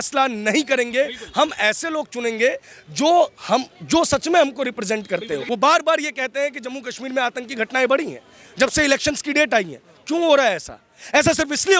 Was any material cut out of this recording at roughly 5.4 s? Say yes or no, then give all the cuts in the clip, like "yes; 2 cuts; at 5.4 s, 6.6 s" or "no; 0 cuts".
yes; 1 cut; at 5.4 s